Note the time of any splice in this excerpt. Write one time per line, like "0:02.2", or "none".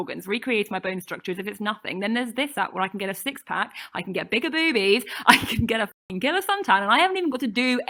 none